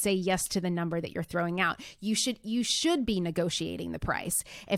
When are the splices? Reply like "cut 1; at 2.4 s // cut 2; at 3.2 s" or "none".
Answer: none